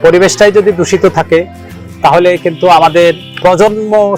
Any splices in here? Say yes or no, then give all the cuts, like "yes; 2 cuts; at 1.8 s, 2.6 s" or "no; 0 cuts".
no; 0 cuts